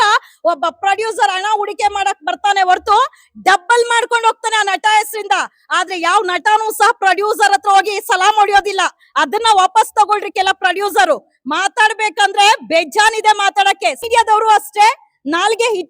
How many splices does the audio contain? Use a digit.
1